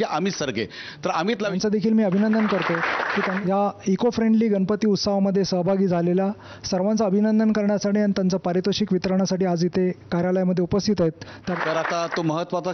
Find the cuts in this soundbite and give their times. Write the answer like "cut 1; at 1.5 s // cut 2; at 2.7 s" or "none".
cut 1; at 1.5 s // cut 2; at 3.3 s // cut 3; at 11.5 s